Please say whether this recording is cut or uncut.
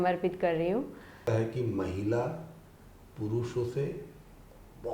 cut